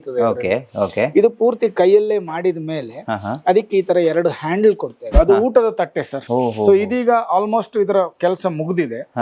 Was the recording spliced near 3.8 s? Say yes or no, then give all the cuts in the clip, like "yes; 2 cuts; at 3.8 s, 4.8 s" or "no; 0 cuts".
no; 2 cuts; at 5.1 s, 6.2 s